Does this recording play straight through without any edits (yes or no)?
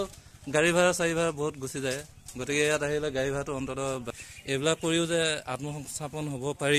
no